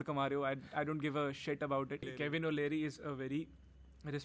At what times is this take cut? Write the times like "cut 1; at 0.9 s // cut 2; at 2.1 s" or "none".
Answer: cut 1; at 2.1 s